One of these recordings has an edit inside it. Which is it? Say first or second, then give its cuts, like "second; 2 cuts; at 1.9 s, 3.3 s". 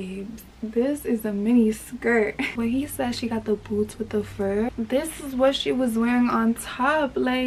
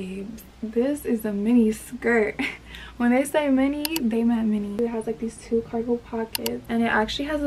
first; 2 cuts; at 2.5 s, 4.7 s